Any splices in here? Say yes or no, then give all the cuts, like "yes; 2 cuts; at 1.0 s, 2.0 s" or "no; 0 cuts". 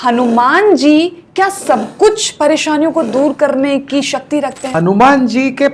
yes; 1 cut; at 4.6 s